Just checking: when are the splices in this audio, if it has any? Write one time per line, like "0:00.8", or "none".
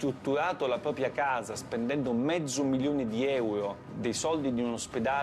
0:03.8